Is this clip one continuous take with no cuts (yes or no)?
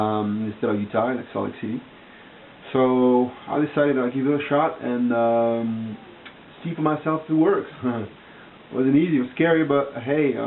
yes